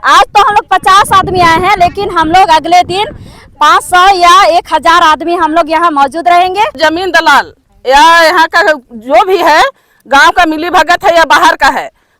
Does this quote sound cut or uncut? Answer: cut